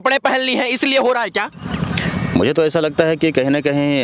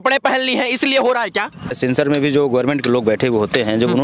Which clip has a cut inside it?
second; 1 cut; at 1.7 s

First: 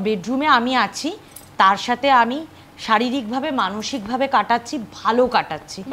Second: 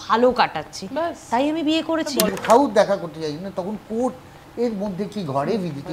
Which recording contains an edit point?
second; 1 cut; at 2.3 s

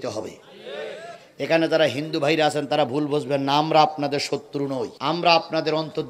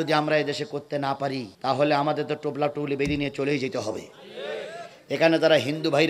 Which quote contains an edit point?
second; 1 cut; at 1.5 s

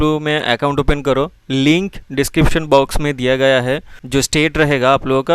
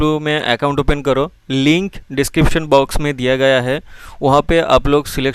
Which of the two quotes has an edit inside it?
first; 1 cut; at 4.0 s

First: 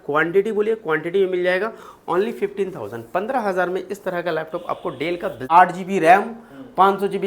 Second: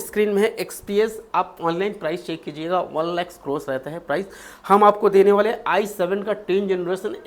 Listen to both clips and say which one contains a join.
first; 1 cut; at 5.3 s

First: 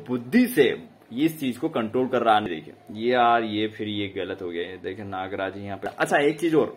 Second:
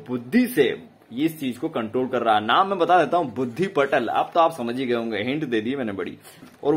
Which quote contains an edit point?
first; 2 cuts; at 2.5 s, 5.9 s

